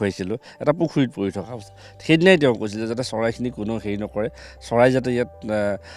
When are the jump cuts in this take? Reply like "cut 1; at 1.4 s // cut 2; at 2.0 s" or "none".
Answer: none

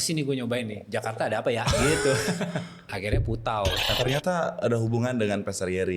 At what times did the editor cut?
cut 1; at 2.9 s // cut 2; at 3.9 s

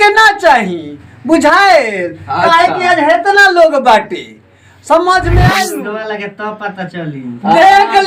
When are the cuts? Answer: cut 1; at 5.8 s

